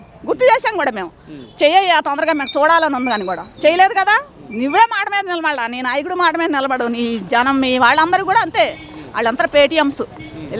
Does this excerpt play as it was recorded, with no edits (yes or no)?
yes